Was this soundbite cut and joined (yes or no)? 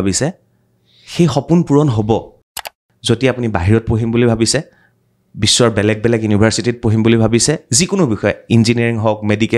yes